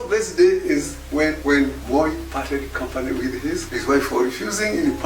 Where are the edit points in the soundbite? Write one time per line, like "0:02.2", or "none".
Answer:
0:01.6
0:03.7